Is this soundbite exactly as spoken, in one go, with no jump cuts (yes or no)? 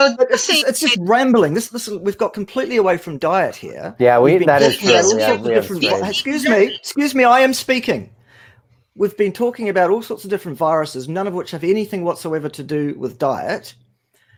yes